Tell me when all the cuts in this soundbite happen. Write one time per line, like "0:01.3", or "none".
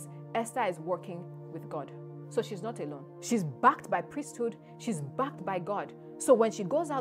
0:03.1